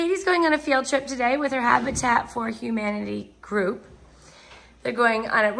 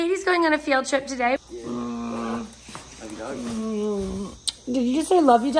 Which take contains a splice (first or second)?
second